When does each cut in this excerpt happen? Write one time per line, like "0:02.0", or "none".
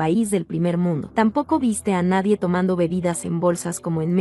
none